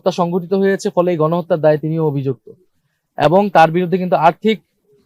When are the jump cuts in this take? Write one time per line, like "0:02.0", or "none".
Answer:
none